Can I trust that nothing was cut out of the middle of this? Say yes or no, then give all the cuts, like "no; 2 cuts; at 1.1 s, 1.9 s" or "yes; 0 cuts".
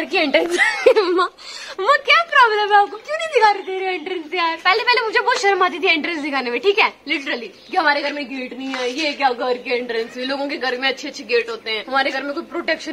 yes; 0 cuts